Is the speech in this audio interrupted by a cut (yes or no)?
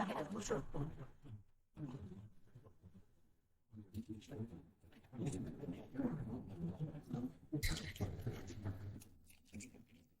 yes